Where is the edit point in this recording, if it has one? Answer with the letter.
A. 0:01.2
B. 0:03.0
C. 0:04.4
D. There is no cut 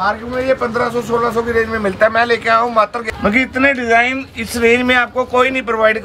B